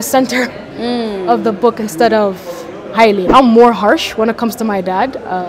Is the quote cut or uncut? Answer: cut